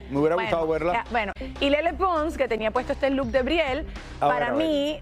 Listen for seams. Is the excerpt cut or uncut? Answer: cut